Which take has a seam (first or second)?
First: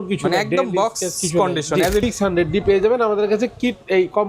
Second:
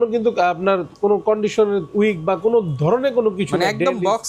first